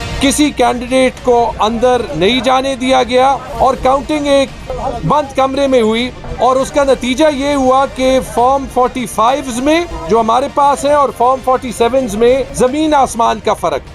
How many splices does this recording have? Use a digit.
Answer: 5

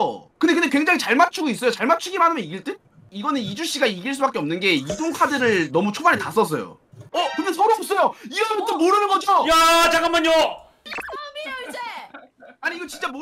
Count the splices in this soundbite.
1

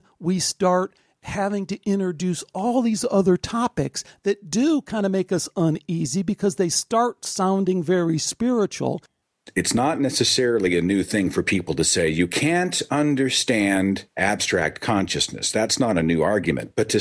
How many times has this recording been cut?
2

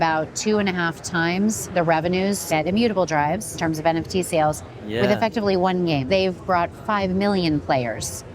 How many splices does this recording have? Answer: 3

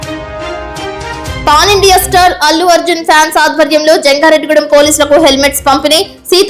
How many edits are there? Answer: 1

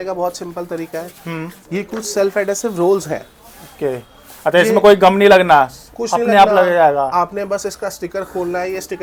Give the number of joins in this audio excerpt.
0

